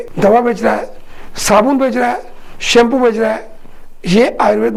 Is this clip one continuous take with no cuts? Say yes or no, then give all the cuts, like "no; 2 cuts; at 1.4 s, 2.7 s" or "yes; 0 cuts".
yes; 0 cuts